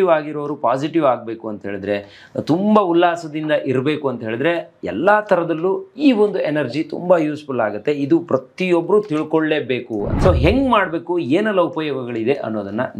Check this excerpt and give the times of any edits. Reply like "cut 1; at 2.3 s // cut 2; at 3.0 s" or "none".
cut 1; at 10.1 s

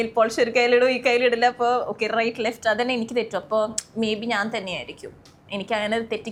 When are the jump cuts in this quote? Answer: none

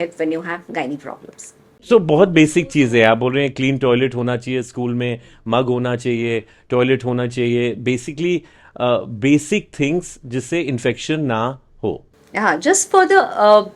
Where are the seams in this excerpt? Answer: cut 1; at 1.9 s

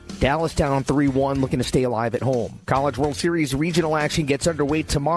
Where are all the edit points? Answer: cut 1; at 2.6 s

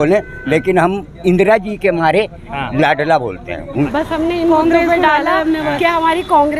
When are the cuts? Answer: cut 1; at 3.9 s

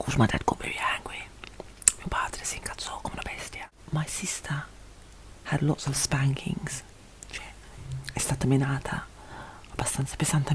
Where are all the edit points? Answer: cut 1; at 3.8 s

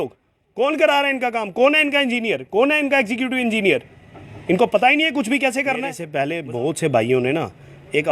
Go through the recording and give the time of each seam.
cut 1; at 6.0 s

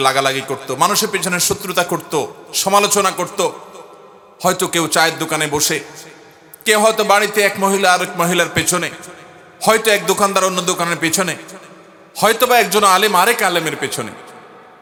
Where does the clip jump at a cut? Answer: none

